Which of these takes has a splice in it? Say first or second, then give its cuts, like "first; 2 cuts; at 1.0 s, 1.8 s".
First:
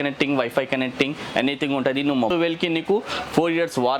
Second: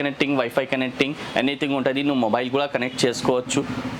first; 1 cut; at 2.3 s